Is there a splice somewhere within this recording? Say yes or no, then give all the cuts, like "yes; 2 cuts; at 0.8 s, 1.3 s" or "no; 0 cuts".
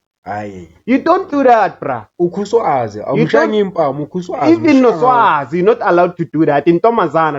no; 0 cuts